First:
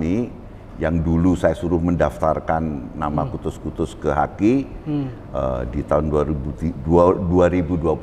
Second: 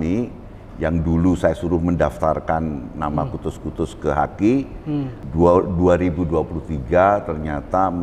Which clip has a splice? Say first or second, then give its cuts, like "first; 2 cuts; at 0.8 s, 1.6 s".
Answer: second; 1 cut; at 5.2 s